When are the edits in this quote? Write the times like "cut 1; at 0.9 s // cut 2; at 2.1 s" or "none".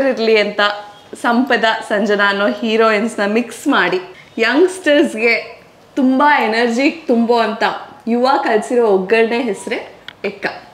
none